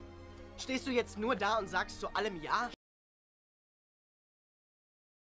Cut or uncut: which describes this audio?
uncut